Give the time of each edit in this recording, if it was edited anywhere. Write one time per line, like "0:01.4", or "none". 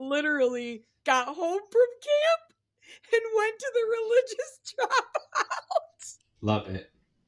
none